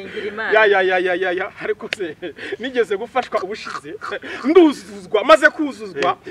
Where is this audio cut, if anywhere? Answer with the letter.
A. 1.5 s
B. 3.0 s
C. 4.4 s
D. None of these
D